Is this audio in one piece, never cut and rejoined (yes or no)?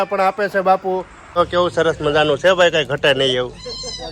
no